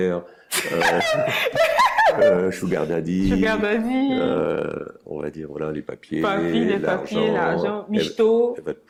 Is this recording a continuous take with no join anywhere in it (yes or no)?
yes